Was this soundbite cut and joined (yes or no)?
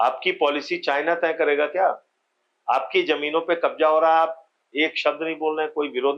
no